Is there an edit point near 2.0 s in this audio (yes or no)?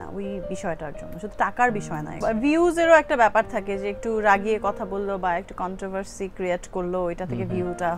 no